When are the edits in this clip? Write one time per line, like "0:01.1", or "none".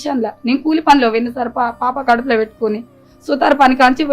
none

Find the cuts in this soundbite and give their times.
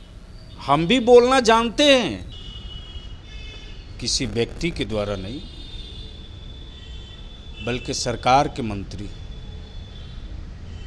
0:02.3

